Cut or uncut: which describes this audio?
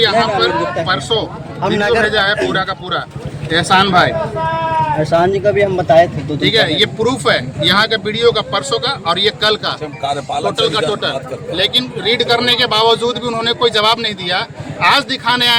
uncut